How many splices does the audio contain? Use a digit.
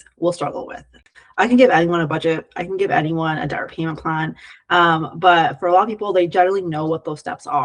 1